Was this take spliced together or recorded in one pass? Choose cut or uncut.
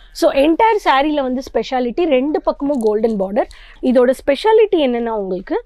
cut